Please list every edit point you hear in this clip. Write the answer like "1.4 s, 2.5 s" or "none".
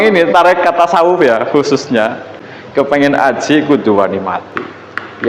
2.9 s